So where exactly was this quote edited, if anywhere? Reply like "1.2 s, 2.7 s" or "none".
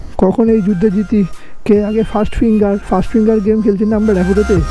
none